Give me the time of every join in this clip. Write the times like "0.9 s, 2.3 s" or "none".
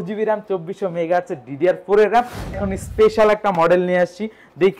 2.6 s

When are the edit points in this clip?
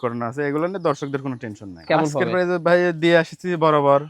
1.8 s

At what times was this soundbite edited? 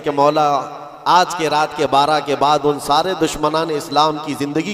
none

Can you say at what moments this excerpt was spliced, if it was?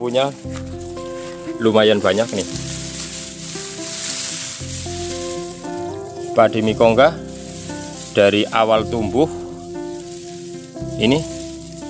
none

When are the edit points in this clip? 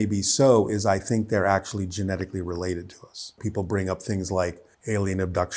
3.3 s

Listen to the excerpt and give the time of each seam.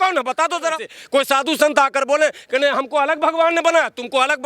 0.9 s

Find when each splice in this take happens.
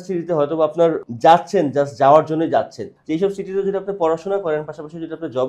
1.0 s, 2.9 s

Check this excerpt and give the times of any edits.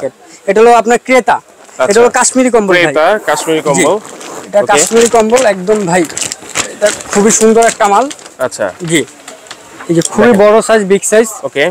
none

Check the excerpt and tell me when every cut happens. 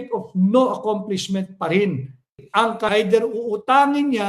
2.9 s

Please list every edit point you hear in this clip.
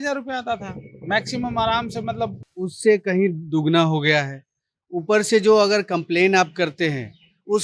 2.4 s

